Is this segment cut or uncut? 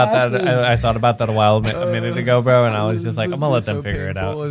uncut